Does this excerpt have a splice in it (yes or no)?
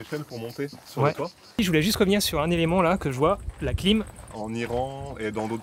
yes